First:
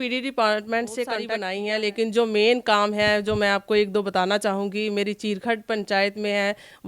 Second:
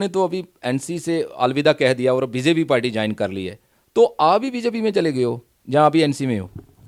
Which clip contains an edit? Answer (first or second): first